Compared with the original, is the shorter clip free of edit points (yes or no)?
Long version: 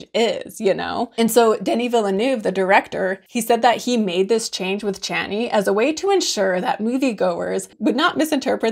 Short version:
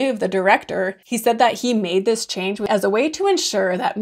no